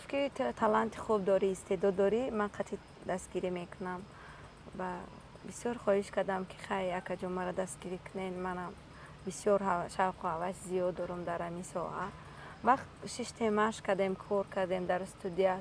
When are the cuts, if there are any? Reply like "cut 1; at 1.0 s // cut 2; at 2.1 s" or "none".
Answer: none